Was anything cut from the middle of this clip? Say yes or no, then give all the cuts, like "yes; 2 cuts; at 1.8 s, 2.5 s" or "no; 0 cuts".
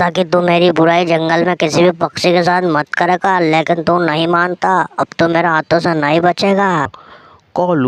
no; 0 cuts